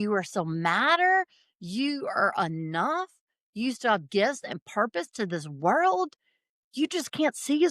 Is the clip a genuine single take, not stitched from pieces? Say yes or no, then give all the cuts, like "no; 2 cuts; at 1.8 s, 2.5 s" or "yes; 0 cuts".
yes; 0 cuts